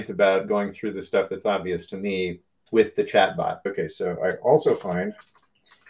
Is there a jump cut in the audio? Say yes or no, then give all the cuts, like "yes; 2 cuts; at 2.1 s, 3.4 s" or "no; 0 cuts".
yes; 2 cuts; at 2.5 s, 3.7 s